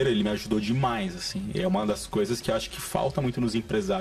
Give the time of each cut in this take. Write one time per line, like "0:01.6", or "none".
none